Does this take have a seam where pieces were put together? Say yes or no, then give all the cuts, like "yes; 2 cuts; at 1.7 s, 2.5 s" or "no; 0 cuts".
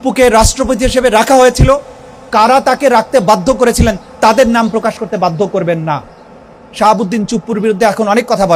no; 0 cuts